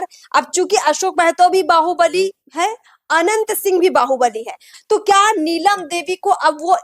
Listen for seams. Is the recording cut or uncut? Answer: cut